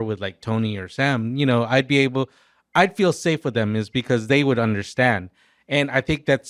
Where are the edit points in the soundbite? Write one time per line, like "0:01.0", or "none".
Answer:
none